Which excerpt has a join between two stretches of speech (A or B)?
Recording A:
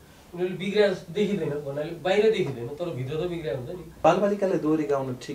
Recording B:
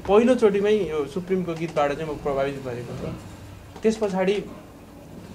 A